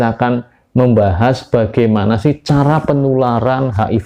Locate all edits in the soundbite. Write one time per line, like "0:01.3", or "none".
none